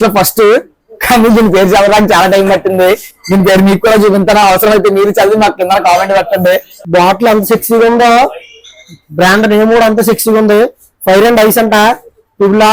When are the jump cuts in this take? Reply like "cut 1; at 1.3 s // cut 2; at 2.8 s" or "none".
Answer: cut 1; at 6.8 s